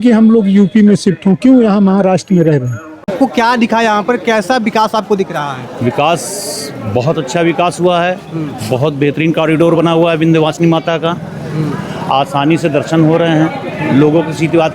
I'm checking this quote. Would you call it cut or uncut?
cut